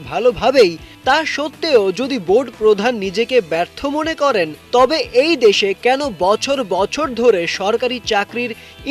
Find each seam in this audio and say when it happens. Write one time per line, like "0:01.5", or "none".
none

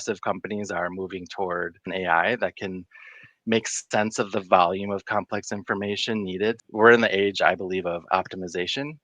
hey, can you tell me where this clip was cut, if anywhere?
0:01.9
0:06.6

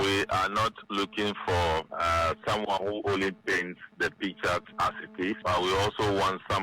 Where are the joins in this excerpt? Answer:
0:01.9
0:05.4

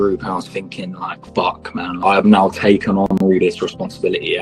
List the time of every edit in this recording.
0:01.1
0:02.0

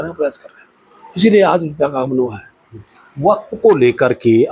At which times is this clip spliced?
none

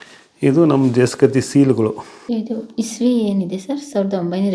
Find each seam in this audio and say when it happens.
0:02.1

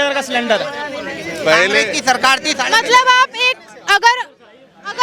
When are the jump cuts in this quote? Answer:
none

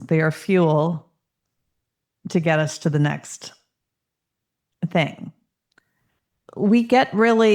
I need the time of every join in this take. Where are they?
0:06.4

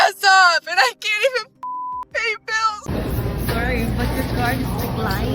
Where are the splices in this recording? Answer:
0:02.8

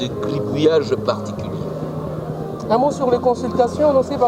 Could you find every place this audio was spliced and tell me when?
none

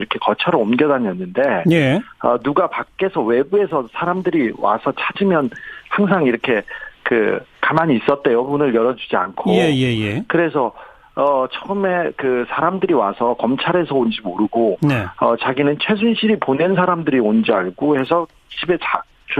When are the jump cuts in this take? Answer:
0:06.6

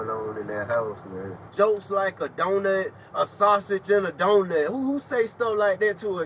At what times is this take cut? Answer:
0:01.5

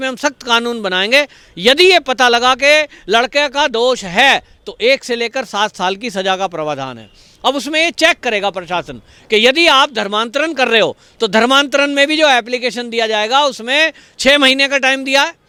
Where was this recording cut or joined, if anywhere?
none

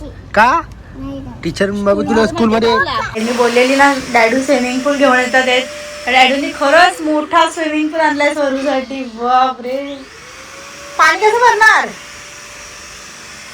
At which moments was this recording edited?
0:03.2

